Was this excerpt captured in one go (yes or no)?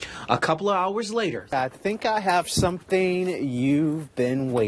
no